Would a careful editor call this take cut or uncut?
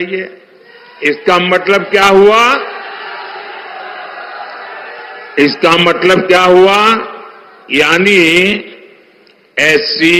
uncut